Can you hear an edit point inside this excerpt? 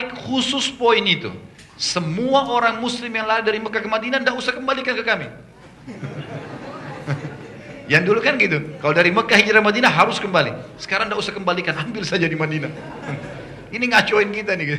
no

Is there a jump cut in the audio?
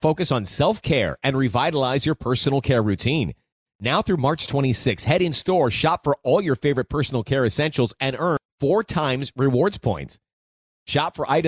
no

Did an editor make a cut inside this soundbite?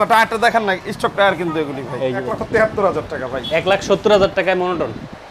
yes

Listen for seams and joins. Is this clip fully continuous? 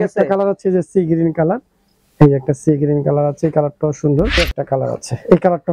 no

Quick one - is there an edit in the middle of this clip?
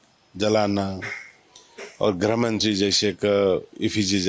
no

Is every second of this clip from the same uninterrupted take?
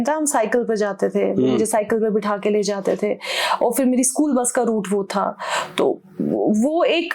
yes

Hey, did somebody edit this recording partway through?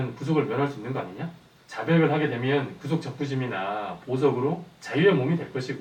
no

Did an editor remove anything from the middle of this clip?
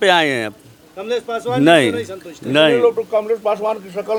no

